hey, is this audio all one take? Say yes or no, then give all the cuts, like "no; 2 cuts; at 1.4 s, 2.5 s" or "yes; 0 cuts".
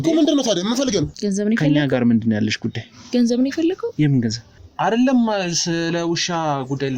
no; 2 cuts; at 1.1 s, 4.6 s